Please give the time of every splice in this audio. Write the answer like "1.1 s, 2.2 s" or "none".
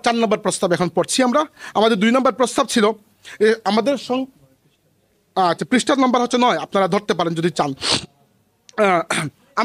none